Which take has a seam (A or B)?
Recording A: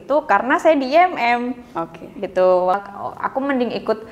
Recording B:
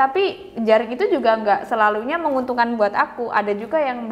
A